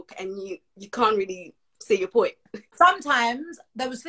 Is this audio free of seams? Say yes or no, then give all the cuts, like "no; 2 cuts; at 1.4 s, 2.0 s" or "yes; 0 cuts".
no; 1 cut; at 2.7 s